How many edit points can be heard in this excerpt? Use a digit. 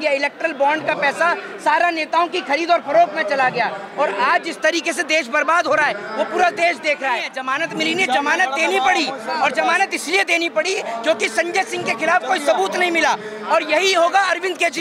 1